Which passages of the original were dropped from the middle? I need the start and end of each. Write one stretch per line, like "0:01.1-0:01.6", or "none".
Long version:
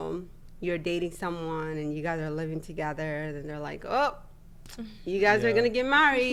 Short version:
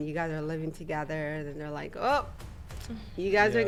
none